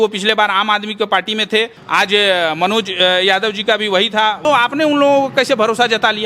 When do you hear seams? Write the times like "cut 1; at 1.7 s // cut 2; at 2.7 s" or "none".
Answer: cut 1; at 1.8 s // cut 2; at 4.4 s